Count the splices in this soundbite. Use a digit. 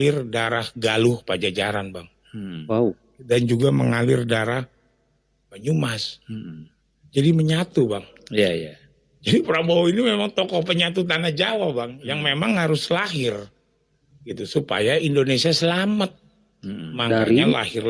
0